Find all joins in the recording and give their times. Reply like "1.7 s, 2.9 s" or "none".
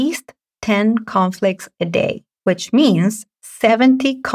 2.3 s